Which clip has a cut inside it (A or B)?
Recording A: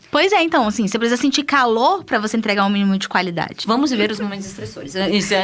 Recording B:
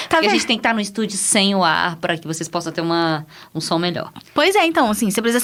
A